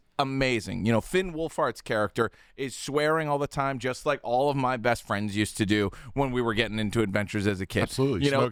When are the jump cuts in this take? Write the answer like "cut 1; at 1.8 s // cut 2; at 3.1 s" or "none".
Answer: none